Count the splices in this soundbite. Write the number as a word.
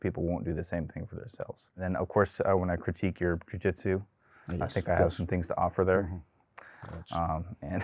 one